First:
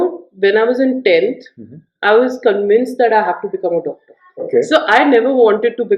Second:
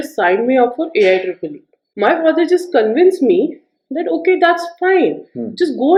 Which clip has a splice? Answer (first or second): first